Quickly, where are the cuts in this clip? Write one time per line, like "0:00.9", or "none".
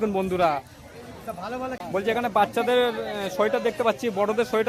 0:01.8